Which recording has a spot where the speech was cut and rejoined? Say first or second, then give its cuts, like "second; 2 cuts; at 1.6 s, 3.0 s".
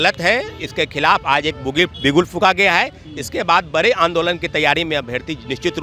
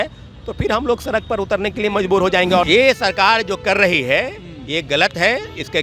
second; 1 cut; at 2.7 s